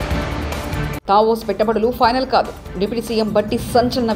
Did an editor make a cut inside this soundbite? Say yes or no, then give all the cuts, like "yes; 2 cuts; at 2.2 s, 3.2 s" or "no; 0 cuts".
yes; 1 cut; at 1.0 s